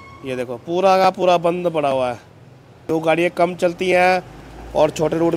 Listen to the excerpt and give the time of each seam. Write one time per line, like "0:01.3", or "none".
0:02.8